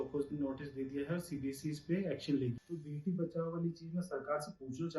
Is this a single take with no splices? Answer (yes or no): no